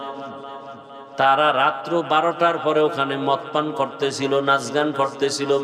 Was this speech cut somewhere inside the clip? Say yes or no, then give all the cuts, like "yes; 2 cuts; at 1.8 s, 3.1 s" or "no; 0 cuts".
no; 0 cuts